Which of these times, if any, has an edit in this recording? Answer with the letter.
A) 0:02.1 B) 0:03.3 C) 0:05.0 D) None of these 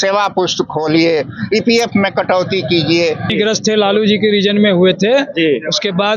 B